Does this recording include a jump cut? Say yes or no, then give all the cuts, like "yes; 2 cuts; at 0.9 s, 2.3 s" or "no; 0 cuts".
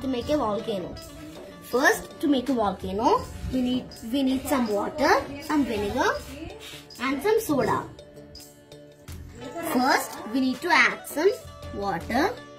no; 0 cuts